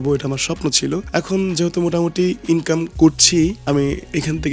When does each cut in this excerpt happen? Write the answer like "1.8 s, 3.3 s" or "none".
1.0 s, 3.6 s